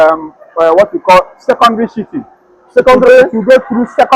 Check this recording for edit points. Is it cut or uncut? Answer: uncut